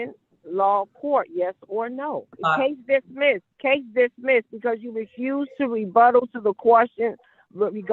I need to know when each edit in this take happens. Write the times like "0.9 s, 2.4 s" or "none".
2.3 s, 3.5 s